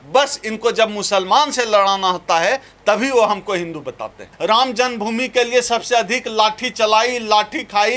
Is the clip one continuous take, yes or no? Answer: no